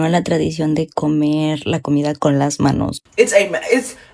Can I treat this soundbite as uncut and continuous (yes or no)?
no